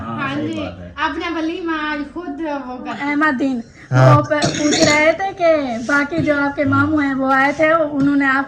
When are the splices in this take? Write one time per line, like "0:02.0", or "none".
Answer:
0:03.0